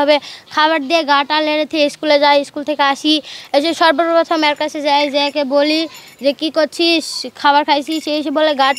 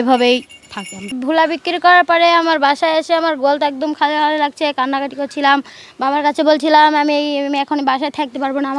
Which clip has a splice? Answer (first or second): second